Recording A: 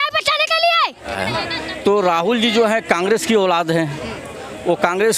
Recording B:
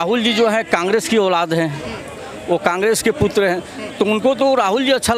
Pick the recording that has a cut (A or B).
A